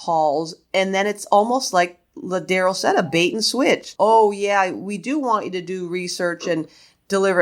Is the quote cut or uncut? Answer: cut